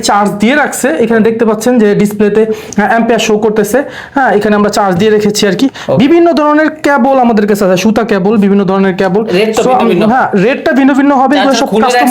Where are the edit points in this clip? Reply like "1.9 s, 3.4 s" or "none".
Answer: none